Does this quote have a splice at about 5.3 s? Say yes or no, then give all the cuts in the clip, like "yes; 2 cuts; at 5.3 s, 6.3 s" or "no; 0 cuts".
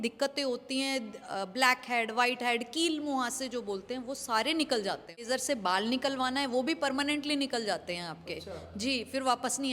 yes; 1 cut; at 5.3 s